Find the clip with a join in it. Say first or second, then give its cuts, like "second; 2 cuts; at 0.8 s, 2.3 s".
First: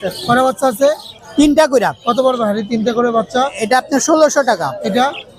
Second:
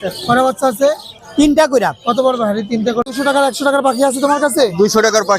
second; 1 cut; at 3.0 s